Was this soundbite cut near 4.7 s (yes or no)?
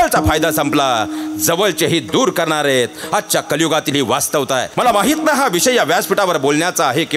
yes